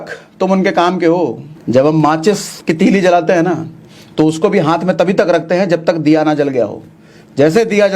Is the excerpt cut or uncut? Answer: cut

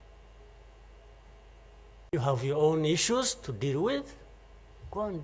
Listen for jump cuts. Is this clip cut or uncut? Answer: cut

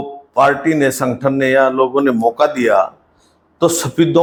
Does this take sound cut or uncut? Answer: uncut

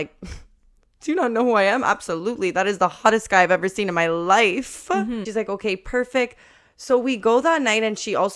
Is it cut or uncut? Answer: cut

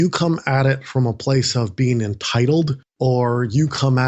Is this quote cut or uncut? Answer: cut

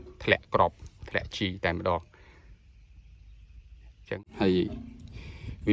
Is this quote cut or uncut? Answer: cut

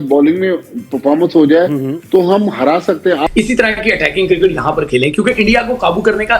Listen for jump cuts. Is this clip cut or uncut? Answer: uncut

